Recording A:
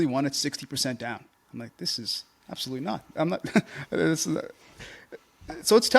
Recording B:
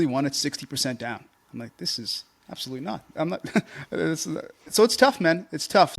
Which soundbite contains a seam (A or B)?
B